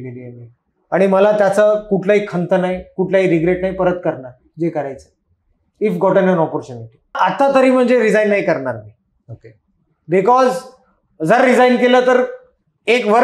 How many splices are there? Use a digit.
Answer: 1